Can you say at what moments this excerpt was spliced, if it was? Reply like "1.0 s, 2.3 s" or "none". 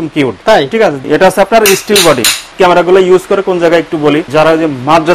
1.1 s, 2.5 s, 4.3 s